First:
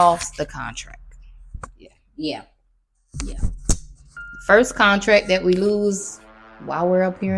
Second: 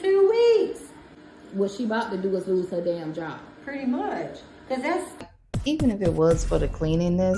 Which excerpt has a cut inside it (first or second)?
second